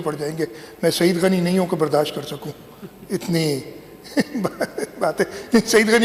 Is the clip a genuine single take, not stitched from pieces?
yes; 0 cuts

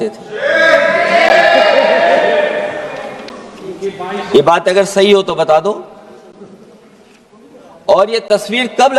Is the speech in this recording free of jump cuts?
yes; 0 cuts

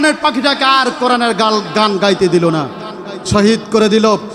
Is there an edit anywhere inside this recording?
no; 0 cuts

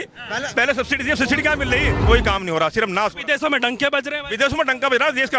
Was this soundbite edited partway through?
yes; 1 cut; at 1.9 s

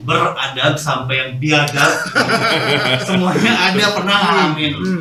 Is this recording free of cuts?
yes; 0 cuts

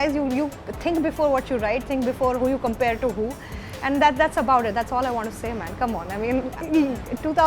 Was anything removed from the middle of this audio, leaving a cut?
yes; 1 cut; at 6.6 s

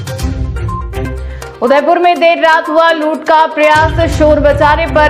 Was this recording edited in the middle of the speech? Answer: yes; 1 cut; at 1.4 s

